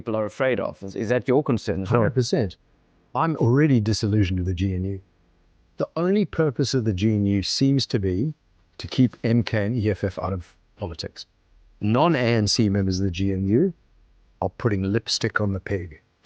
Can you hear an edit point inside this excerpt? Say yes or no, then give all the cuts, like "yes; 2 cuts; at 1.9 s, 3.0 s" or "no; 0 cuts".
yes; 1 cut; at 11.5 s